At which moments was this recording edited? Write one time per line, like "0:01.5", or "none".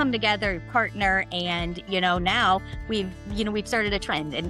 none